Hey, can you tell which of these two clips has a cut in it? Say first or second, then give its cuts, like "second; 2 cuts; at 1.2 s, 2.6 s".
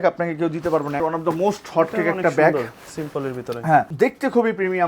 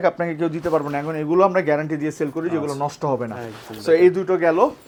first; 2 cuts; at 1.0 s, 3.9 s